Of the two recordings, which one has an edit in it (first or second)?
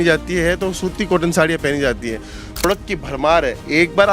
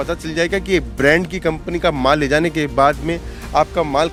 first